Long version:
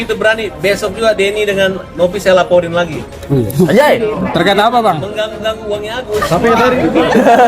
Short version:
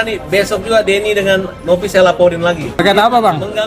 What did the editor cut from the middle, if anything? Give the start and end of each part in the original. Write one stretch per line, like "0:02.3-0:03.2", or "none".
0:03.1-0:04.4